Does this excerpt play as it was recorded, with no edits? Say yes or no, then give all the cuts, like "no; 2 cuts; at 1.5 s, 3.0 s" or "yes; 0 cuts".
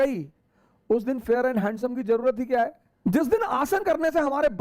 no; 1 cut; at 2.8 s